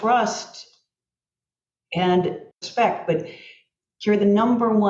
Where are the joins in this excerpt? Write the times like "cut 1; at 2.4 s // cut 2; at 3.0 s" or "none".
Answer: cut 1; at 2.4 s